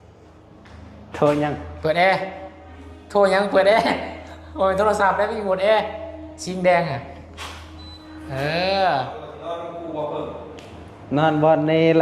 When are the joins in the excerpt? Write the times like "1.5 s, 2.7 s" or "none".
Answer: 9.3 s